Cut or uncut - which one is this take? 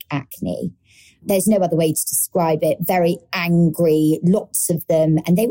cut